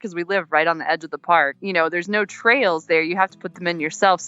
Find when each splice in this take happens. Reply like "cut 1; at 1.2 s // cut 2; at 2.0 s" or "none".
cut 1; at 1.6 s

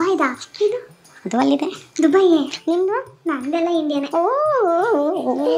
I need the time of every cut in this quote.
none

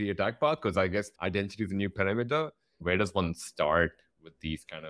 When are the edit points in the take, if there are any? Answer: cut 1; at 1.1 s // cut 2; at 2.8 s

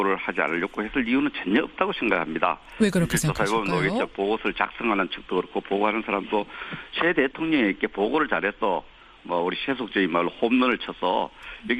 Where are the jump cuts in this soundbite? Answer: cut 1; at 3.6 s

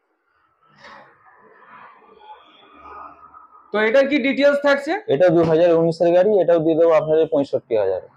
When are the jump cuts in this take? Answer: none

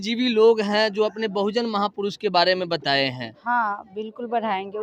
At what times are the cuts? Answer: cut 1; at 3.4 s

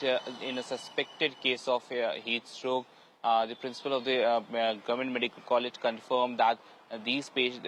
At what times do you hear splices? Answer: none

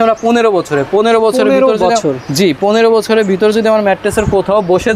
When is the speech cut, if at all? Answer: none

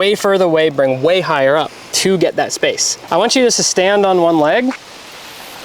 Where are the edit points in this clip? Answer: cut 1; at 2.9 s

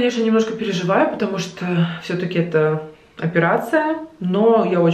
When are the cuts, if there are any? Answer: none

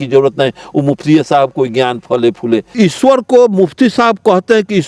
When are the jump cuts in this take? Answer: cut 1; at 2.7 s

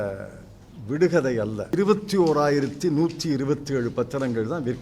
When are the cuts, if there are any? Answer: cut 1; at 1.7 s

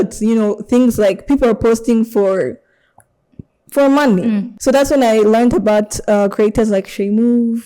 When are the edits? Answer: cut 1; at 4.5 s

